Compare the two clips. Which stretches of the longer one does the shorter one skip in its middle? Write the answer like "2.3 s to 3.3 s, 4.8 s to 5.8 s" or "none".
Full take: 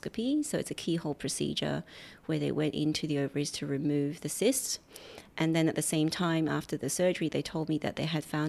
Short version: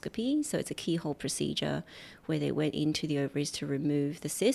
none